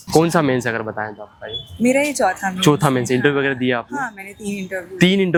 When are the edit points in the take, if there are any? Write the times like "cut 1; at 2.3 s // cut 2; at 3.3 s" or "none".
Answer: none